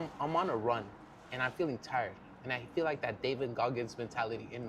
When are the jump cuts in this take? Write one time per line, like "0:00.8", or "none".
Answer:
none